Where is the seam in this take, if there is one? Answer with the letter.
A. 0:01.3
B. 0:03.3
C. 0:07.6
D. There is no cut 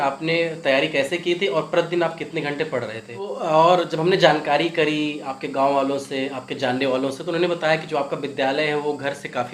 B